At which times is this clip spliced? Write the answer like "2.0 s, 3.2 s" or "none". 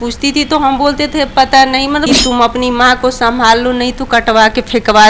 2.1 s